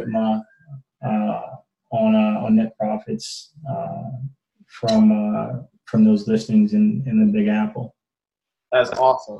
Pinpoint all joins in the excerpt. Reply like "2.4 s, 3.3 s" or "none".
none